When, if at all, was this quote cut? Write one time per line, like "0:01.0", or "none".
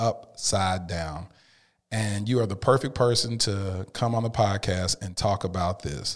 none